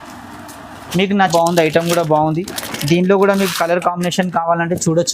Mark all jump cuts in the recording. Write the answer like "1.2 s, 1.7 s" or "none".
1.3 s